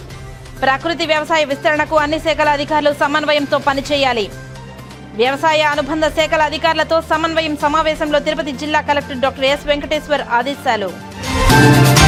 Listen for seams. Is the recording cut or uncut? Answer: uncut